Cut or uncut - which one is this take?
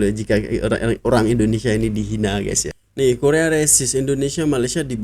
cut